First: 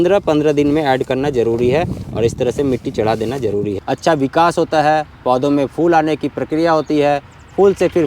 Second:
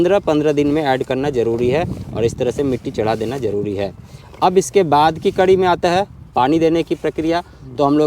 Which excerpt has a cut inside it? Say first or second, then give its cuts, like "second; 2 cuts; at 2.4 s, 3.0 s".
first; 1 cut; at 3.8 s